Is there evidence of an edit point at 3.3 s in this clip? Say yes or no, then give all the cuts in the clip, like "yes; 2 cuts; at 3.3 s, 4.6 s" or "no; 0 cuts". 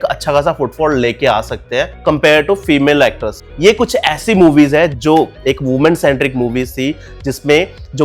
yes; 1 cut; at 3.3 s